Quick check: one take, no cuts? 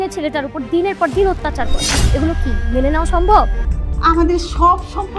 no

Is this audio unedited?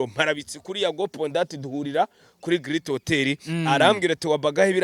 yes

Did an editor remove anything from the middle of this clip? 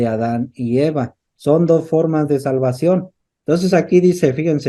yes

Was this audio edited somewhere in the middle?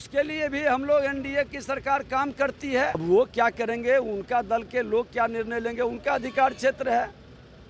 yes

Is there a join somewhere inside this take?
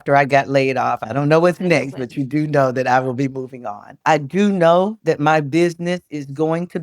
yes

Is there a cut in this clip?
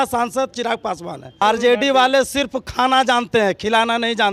yes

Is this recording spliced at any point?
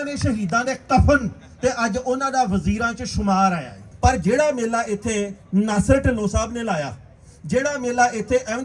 yes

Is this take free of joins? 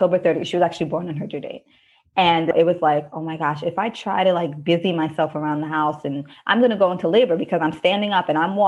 no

